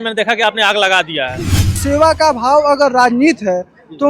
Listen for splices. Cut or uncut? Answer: cut